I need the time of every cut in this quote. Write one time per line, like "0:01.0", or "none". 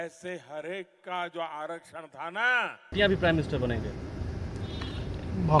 0:02.9

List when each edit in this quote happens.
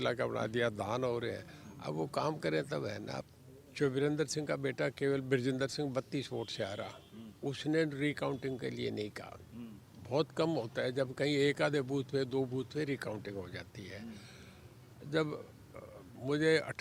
0:03.2

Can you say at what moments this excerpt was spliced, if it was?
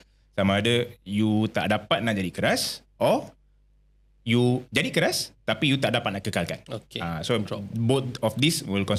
none

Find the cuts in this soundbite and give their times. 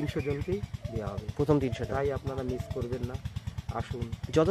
none

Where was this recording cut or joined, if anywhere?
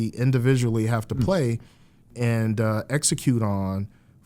0:02.1

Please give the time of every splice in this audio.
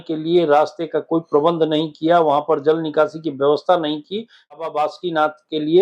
0:04.6

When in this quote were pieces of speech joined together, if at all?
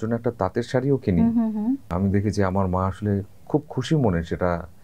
0:01.9

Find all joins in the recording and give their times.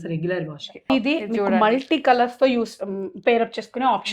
0:00.9

